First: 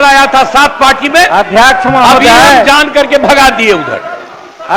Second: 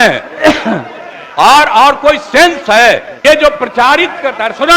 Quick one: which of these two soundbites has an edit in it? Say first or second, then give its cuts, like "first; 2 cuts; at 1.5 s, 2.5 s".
second; 1 cut; at 3.1 s